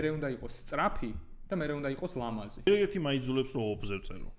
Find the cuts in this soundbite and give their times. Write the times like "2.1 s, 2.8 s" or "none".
2.7 s